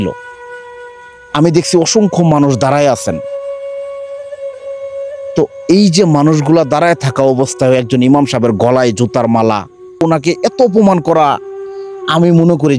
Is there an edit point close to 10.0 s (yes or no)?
yes